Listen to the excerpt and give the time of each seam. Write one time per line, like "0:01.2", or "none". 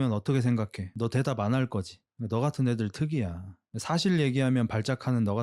none